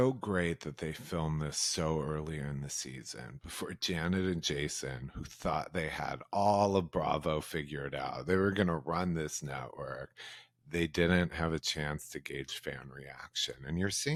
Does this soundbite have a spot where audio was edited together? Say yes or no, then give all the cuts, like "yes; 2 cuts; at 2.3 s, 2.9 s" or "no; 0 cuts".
no; 0 cuts